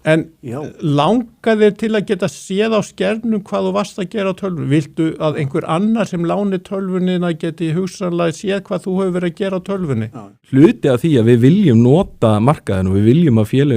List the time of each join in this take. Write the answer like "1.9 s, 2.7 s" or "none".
10.4 s